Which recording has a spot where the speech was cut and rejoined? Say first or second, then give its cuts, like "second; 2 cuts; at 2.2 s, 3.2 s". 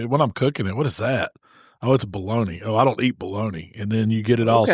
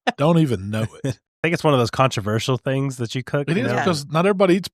second; 1 cut; at 1.2 s